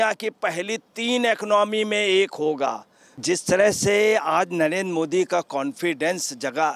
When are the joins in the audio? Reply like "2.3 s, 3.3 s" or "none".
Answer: 3.2 s